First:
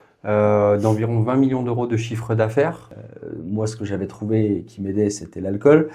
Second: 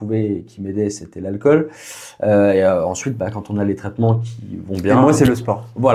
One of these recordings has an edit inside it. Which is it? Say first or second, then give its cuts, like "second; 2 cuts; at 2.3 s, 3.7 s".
first; 1 cut; at 2.9 s